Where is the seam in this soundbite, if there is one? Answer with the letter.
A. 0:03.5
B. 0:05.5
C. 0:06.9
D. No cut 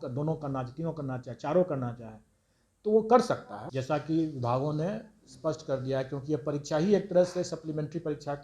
A